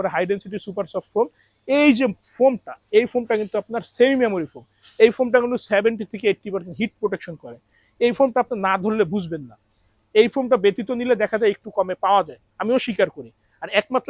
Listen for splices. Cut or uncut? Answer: uncut